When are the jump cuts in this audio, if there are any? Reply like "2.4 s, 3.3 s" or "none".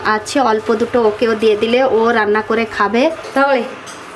3.2 s